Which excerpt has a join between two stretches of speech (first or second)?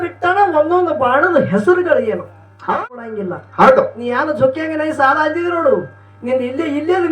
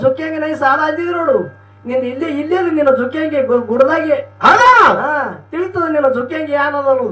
first